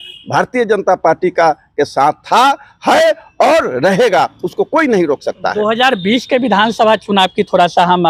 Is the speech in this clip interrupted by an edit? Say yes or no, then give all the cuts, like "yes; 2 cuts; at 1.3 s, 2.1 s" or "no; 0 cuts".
no; 0 cuts